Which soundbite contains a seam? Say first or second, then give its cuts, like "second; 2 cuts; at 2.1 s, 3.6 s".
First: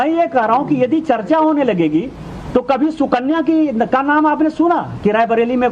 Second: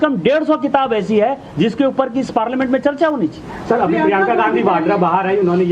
second; 1 cut; at 3.5 s